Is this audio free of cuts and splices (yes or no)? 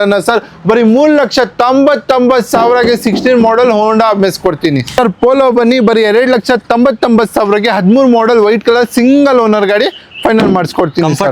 no